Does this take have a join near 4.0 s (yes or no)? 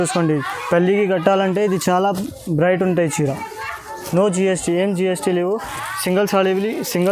yes